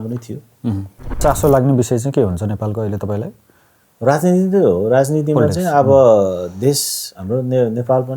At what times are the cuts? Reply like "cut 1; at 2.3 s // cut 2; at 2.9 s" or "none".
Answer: cut 1; at 1.2 s